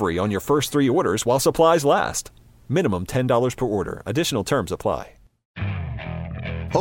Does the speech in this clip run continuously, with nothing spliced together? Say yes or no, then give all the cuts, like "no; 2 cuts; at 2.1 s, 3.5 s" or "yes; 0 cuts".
no; 1 cut; at 5.5 s